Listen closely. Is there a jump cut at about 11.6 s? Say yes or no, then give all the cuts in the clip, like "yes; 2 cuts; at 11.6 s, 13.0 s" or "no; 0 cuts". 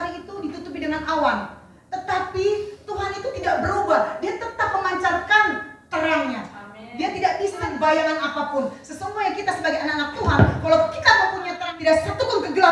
yes; 2 cuts; at 7.6 s, 11.6 s